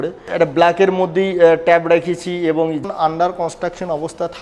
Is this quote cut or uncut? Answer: cut